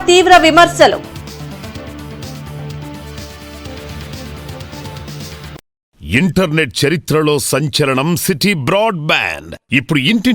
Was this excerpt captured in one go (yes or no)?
no